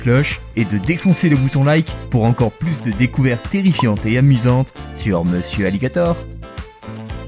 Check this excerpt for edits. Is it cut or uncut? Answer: cut